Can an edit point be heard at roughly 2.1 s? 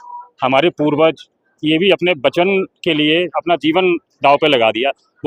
no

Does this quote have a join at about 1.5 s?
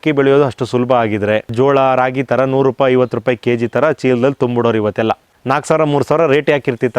yes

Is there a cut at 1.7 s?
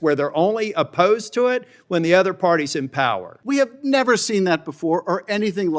no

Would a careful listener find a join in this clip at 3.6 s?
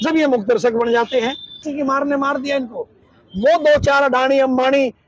no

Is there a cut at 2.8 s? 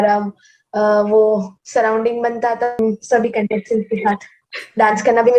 yes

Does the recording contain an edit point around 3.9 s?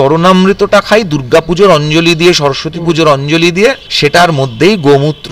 yes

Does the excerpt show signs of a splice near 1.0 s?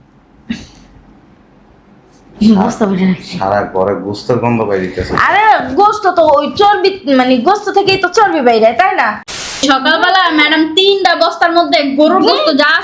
no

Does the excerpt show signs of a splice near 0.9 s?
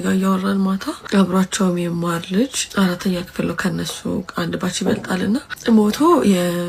yes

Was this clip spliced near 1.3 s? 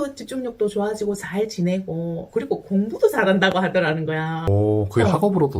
no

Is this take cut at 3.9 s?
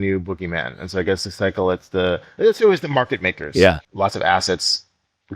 yes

